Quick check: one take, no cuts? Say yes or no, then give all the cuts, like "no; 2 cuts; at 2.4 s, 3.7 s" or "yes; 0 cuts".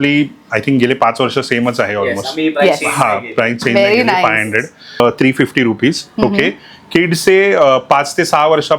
no; 1 cut; at 5.0 s